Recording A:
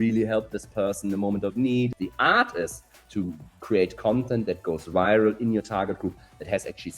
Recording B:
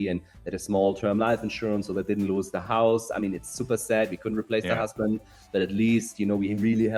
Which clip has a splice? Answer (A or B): A